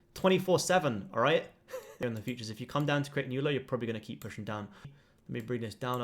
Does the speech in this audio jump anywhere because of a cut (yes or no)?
yes